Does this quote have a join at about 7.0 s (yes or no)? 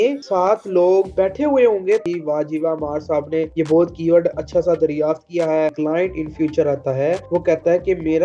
no